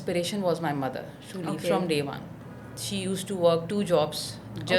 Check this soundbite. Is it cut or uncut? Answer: uncut